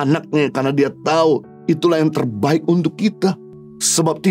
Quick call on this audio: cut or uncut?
uncut